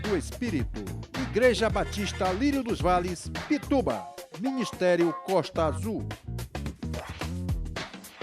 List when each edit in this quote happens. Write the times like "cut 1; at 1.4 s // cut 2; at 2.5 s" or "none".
none